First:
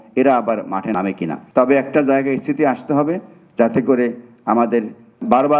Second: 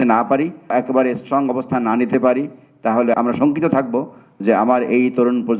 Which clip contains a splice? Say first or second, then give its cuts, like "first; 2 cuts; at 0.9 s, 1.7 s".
first; 1 cut; at 1.3 s